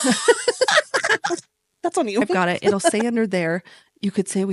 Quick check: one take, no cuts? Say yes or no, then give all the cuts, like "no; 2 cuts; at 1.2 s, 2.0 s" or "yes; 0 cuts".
no; 1 cut; at 2.9 s